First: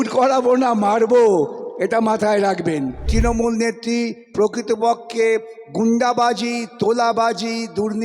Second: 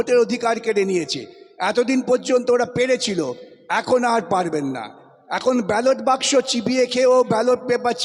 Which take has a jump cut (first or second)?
first